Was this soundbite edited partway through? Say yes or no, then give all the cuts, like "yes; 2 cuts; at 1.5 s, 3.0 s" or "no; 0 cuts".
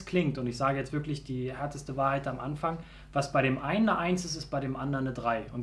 no; 0 cuts